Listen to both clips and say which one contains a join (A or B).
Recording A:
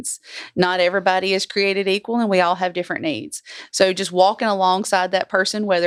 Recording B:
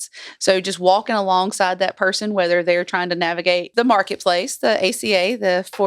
B